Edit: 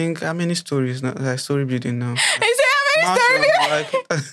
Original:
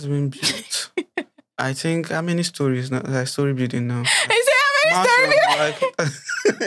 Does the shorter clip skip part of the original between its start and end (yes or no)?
no